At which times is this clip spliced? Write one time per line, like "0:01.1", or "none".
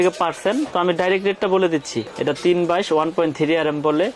0:02.1